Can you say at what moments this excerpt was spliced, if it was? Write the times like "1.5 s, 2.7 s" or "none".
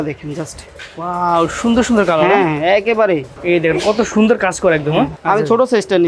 3.4 s, 5.2 s

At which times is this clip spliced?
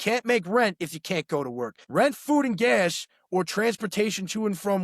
1.8 s

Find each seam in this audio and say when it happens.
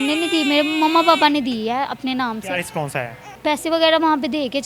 3.3 s

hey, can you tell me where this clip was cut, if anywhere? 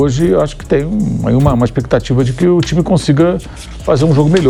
none

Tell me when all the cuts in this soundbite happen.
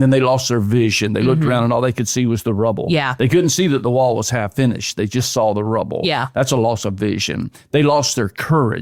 none

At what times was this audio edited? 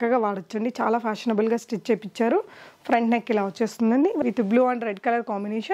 4.2 s

